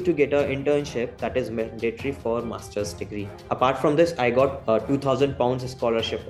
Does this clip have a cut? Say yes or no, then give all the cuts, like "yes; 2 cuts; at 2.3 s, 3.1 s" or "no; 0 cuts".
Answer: yes; 2 cuts; at 1.2 s, 4.6 s